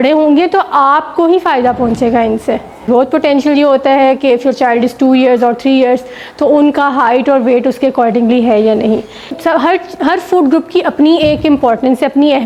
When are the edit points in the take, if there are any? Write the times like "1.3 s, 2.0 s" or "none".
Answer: 2.9 s, 9.3 s